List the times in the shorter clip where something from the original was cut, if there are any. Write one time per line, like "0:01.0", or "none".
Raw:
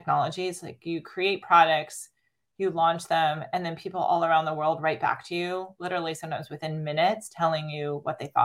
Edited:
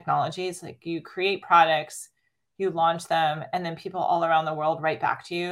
none